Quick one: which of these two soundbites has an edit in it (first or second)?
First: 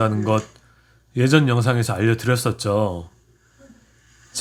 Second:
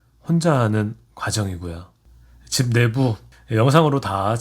second